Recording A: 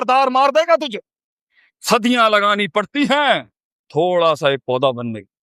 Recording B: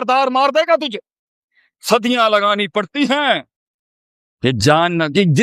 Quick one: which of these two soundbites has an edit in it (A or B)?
B